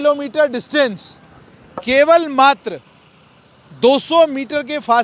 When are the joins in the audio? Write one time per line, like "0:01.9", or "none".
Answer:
none